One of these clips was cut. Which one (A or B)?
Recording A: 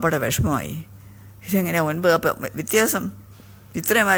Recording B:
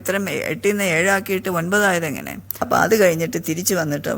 B